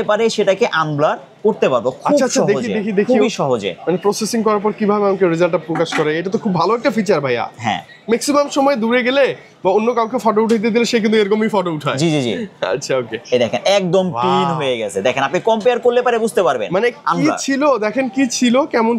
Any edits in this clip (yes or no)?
no